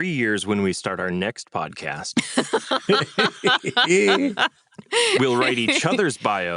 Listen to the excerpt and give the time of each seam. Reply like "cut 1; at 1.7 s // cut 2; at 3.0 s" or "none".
none